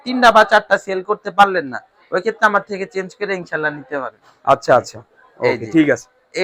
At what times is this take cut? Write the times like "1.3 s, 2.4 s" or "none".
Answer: none